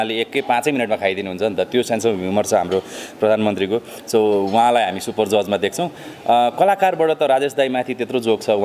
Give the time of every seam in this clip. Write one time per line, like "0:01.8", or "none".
none